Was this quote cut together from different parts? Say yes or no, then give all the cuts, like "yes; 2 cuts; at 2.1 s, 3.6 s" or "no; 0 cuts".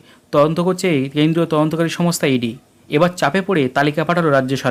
no; 0 cuts